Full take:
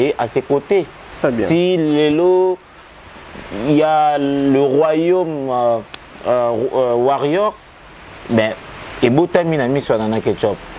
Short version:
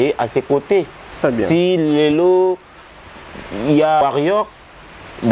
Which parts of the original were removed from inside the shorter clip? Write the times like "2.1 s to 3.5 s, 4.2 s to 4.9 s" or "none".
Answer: 4.0 s to 7.1 s